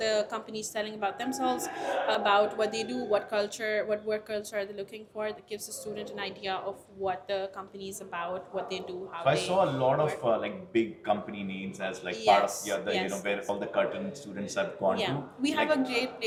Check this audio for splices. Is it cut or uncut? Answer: uncut